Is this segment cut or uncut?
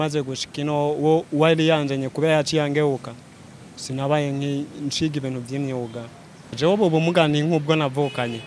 cut